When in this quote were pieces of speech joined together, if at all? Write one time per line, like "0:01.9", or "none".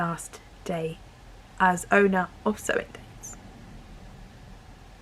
none